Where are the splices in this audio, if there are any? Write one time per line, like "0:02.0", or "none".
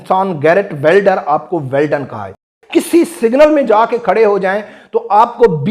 0:02.5